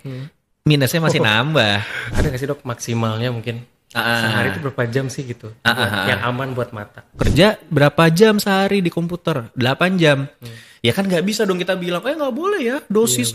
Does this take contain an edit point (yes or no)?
yes